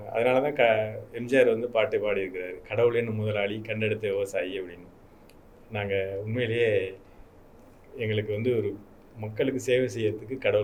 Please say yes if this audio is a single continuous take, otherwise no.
yes